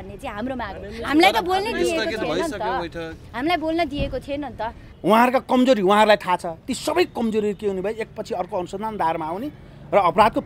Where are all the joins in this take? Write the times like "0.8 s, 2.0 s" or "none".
4.8 s